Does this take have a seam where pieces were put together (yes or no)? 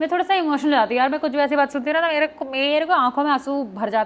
no